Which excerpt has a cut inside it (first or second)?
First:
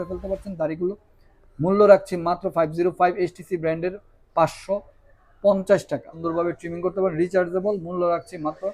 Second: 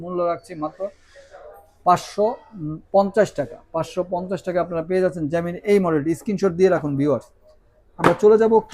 first